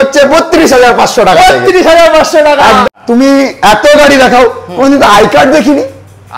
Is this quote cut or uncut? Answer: cut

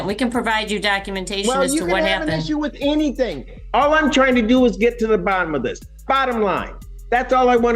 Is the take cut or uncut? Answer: uncut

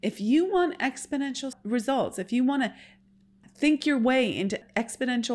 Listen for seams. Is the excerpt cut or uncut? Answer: cut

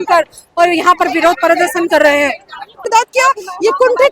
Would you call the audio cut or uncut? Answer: cut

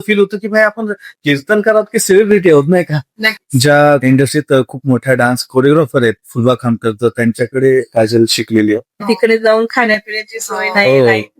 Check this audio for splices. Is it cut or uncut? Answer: cut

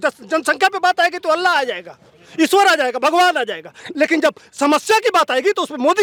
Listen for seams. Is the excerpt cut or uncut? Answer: uncut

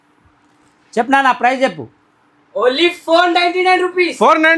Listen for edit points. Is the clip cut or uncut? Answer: uncut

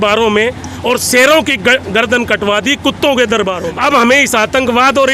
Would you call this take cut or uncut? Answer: cut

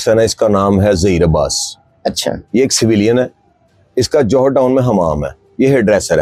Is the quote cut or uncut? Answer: uncut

